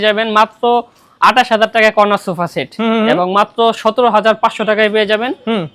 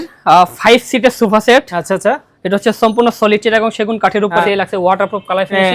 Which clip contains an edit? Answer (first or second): second